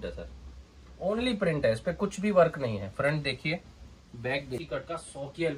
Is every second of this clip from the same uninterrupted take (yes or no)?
no